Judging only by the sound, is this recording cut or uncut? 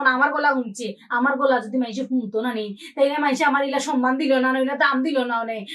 uncut